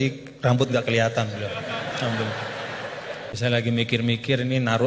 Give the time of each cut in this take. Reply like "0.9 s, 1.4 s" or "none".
3.4 s